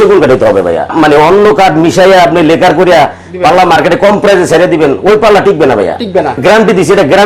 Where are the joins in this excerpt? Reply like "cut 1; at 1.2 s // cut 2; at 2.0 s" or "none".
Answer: cut 1; at 0.9 s // cut 2; at 6.4 s